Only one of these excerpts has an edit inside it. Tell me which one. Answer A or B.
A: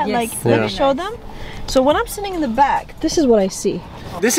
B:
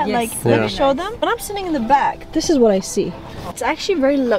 B